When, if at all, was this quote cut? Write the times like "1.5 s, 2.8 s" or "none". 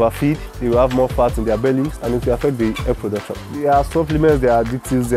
2.0 s, 3.4 s